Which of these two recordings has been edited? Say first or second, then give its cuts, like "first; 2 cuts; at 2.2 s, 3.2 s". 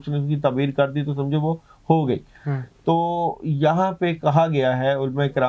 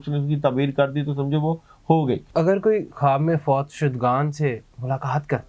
second; 1 cut; at 2.2 s